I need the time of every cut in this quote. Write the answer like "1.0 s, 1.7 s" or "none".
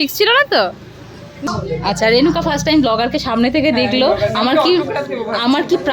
1.4 s